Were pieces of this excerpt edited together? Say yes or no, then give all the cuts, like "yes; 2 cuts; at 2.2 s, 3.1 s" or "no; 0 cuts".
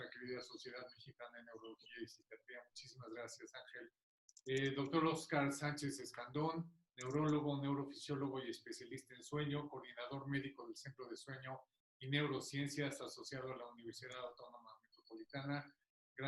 no; 0 cuts